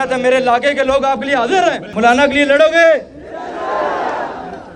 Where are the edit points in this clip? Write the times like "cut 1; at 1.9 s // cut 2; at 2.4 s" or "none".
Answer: cut 1; at 1.8 s